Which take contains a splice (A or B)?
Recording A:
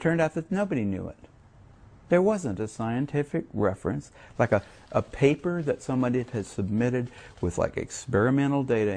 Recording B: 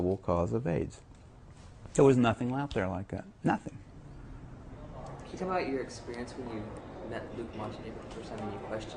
A